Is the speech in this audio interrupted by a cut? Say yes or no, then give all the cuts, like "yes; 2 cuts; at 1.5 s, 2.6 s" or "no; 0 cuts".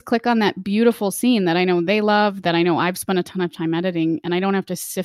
no; 0 cuts